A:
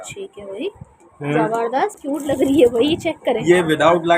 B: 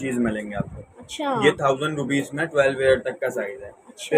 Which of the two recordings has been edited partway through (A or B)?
A